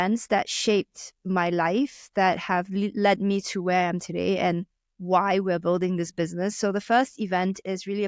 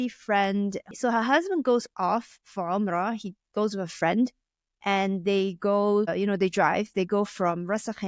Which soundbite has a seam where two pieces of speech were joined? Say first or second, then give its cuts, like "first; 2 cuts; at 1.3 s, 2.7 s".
second; 1 cut; at 0.9 s